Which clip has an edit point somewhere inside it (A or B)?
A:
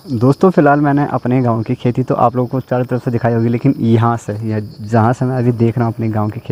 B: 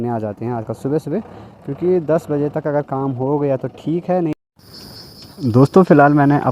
B